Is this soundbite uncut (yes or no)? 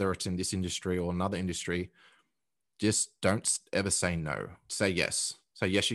no